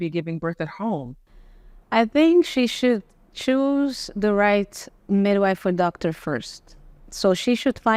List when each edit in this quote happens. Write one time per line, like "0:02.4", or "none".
none